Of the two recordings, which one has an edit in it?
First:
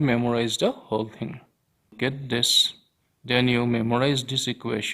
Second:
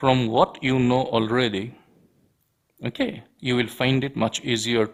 first; 1 cut; at 1.9 s

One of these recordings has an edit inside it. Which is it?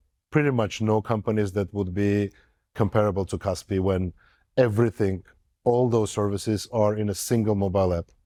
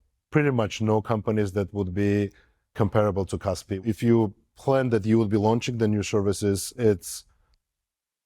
second; 1 cut; at 3.8 s

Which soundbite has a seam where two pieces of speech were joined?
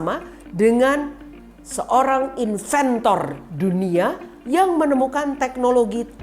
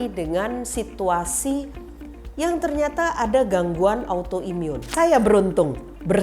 second; 1 cut; at 4.8 s

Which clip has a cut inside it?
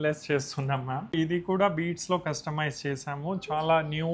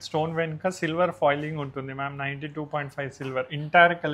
first; 1 cut; at 1.1 s

